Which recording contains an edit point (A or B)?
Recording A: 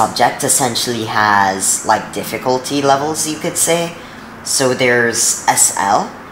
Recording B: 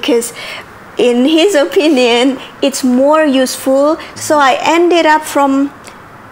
B